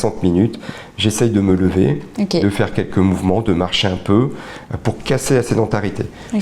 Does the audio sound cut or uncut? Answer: uncut